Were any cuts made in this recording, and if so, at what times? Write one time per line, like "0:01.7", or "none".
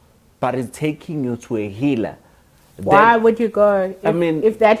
none